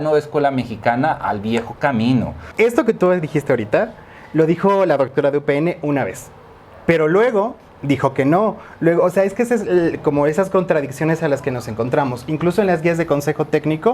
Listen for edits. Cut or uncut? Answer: cut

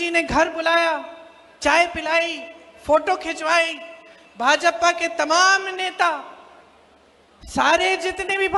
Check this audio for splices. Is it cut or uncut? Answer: uncut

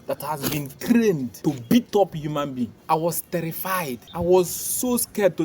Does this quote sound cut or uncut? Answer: cut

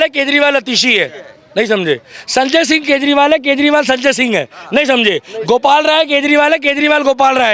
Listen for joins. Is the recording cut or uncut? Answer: uncut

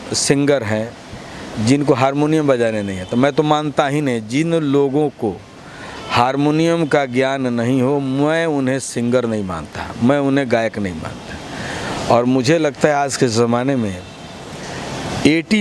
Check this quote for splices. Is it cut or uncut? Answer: uncut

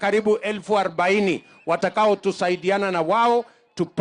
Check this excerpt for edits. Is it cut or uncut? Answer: uncut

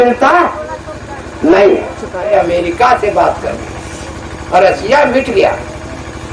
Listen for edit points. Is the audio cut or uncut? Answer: cut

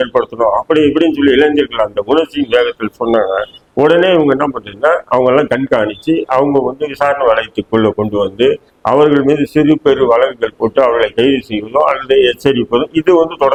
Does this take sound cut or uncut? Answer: uncut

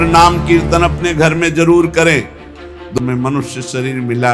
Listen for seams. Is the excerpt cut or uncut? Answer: cut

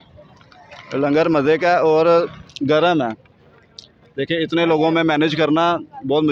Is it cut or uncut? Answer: uncut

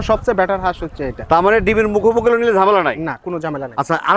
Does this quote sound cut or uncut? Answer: uncut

